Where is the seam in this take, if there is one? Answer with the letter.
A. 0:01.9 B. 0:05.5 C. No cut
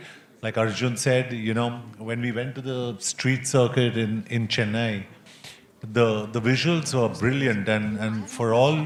C